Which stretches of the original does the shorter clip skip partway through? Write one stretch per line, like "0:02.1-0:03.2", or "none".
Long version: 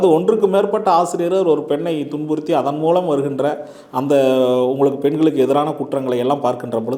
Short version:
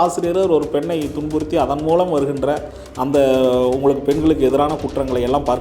none